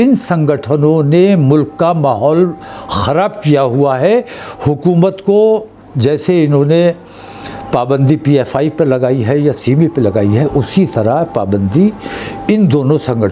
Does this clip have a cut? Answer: no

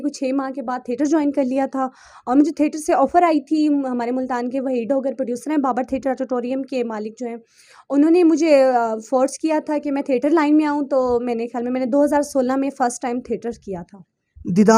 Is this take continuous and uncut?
yes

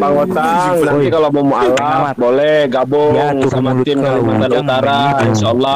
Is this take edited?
no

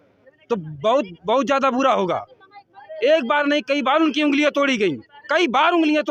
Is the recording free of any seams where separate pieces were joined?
yes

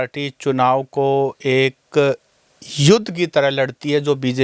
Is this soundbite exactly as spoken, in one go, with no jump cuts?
yes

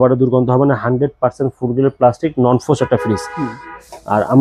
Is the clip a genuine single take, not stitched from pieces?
yes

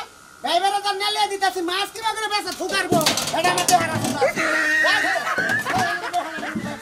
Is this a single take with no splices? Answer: yes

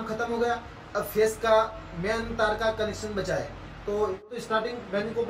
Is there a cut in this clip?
yes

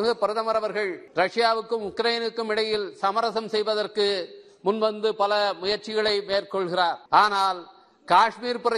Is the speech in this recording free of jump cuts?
no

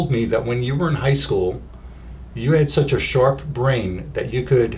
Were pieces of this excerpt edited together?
no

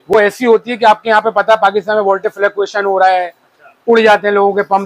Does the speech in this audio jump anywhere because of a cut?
no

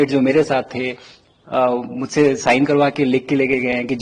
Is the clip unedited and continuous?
yes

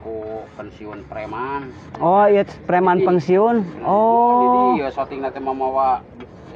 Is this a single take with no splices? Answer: yes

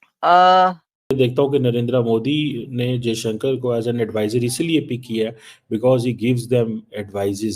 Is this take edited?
yes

